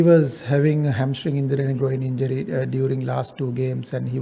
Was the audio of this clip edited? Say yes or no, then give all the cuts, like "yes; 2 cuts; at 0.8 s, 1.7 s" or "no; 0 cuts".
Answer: no; 0 cuts